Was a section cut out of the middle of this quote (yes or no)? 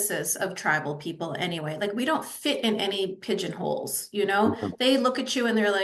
no